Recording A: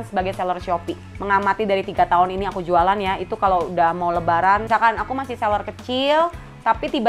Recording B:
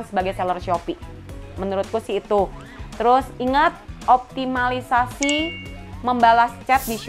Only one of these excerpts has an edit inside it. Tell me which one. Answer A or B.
A